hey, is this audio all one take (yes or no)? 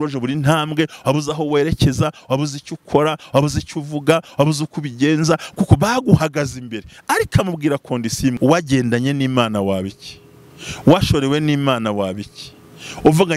no